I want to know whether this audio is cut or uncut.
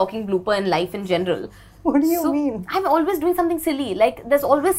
uncut